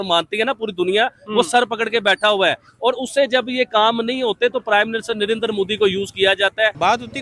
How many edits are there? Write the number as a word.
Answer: zero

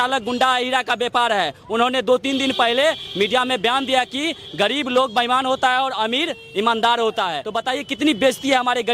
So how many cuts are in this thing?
one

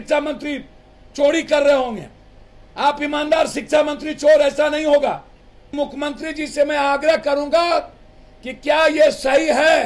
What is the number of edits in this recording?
one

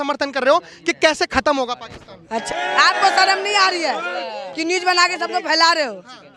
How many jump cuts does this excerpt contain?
one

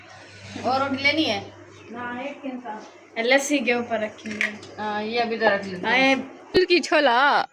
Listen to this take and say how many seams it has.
one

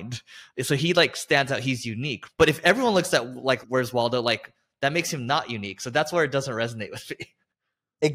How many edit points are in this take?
two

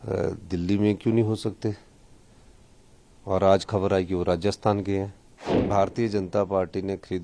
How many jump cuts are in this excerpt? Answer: one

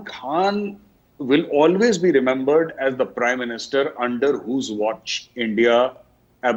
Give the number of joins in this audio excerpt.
zero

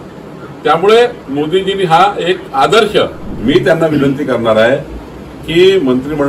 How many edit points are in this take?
one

